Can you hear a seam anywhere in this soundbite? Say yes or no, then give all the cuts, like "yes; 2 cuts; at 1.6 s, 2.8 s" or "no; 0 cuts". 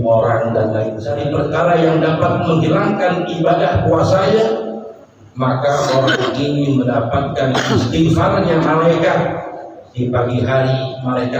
yes; 1 cut; at 1.0 s